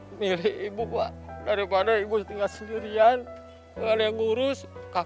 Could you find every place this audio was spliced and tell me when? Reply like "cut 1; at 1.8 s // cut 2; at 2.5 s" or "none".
none